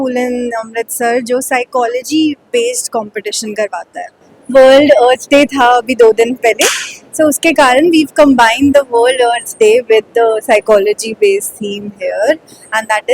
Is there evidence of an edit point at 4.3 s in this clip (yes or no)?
no